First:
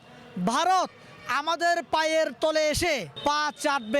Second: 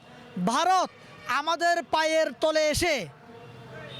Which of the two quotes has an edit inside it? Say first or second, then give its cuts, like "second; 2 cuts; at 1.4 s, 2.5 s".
first; 1 cut; at 3.1 s